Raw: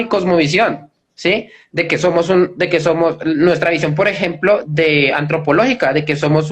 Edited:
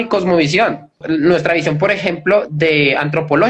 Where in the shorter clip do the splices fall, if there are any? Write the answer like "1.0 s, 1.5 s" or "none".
1.0 s